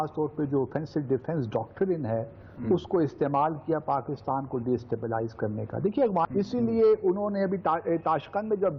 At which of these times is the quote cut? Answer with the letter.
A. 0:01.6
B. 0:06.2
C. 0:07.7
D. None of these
B